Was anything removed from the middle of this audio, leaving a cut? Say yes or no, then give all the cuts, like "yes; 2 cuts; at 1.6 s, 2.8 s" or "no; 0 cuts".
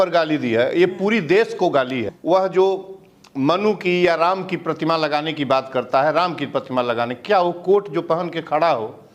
yes; 1 cut; at 2.1 s